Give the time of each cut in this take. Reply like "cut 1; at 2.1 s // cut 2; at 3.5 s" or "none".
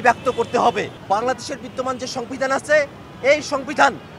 cut 1; at 0.9 s